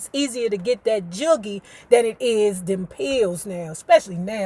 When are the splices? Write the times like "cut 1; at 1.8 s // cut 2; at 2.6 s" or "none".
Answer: none